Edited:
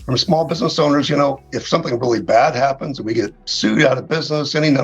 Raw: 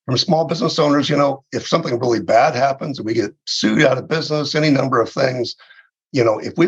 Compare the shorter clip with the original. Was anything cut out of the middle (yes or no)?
no